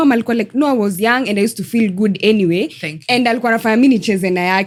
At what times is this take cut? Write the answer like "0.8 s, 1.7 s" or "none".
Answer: none